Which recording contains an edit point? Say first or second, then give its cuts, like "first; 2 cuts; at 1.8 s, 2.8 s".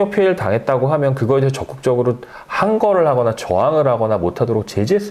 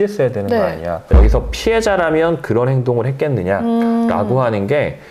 second; 1 cut; at 1.1 s